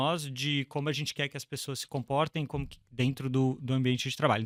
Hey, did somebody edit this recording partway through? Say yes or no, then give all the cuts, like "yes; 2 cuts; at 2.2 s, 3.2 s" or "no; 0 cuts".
no; 0 cuts